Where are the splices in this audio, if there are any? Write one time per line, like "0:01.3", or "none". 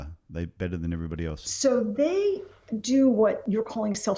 0:00.9